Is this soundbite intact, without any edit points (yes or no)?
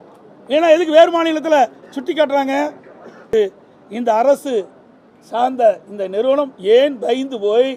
no